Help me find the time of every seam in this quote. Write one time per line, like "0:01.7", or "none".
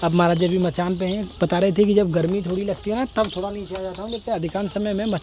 none